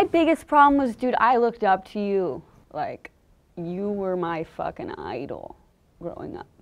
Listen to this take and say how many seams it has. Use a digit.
1